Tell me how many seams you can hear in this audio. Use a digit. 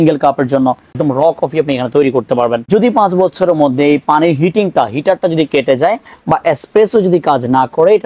2